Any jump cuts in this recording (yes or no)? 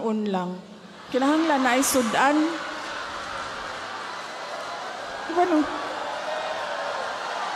no